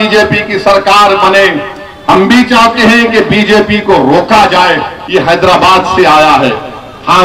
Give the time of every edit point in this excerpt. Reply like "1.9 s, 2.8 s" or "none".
4.9 s

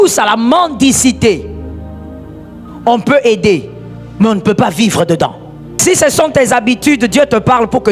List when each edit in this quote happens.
1.5 s, 2.8 s, 5.8 s

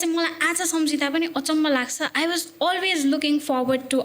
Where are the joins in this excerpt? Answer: none

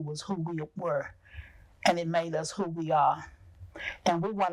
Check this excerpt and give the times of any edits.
none

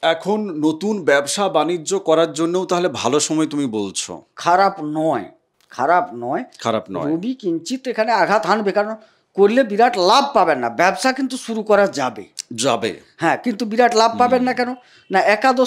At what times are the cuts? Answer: none

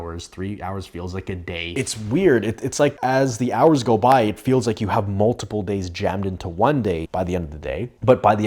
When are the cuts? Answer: 1.7 s, 3.0 s, 7.1 s

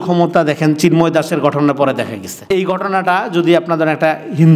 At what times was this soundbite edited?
2.5 s

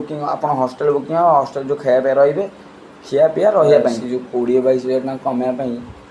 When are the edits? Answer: 4.1 s

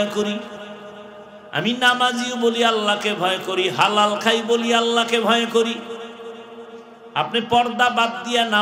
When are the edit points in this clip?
none

